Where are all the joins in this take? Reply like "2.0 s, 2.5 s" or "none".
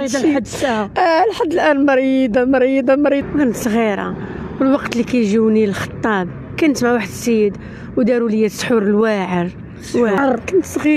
3.2 s, 10.2 s